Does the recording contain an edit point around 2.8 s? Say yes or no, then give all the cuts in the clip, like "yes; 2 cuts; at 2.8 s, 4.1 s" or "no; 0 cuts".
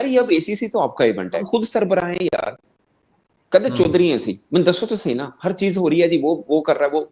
no; 1 cut; at 1.4 s